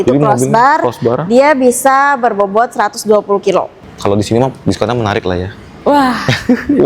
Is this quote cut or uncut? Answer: cut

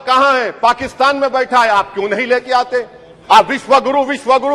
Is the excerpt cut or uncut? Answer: uncut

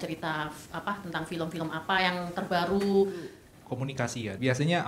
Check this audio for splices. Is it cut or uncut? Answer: cut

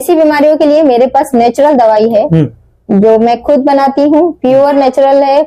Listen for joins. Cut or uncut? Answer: uncut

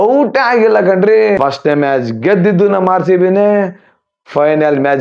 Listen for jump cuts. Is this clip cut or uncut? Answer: cut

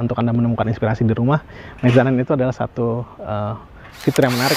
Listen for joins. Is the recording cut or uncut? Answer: uncut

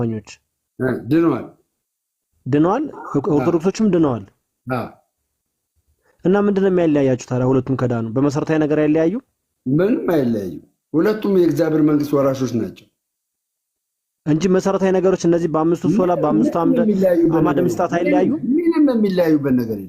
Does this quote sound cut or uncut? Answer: uncut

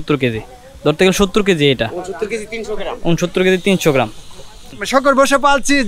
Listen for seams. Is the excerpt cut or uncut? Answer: cut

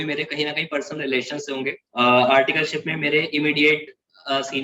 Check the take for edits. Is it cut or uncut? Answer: cut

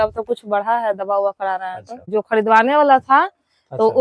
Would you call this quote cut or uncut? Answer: cut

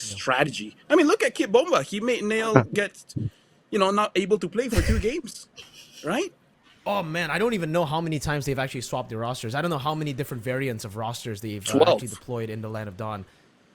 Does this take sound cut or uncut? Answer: cut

